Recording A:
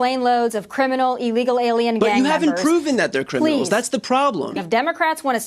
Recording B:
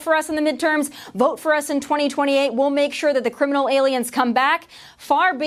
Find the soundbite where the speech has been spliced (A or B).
A